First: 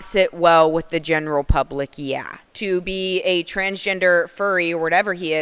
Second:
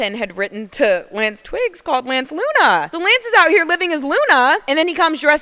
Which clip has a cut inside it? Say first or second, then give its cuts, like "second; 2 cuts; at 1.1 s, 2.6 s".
first; 1 cut; at 2.4 s